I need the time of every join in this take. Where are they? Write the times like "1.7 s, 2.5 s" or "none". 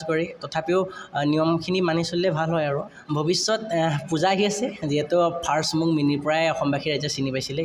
3.0 s